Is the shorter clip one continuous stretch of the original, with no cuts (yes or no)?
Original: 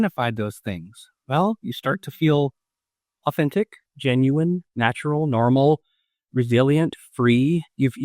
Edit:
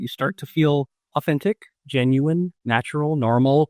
no